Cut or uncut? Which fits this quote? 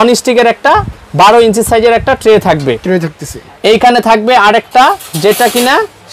uncut